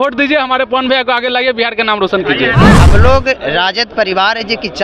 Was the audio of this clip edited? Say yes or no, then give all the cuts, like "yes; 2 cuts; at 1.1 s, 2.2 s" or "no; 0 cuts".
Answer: yes; 1 cut; at 2.7 s